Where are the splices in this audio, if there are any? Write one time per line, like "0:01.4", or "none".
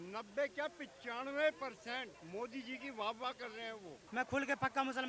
0:02.2
0:04.0